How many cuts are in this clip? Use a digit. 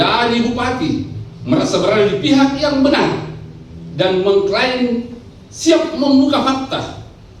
0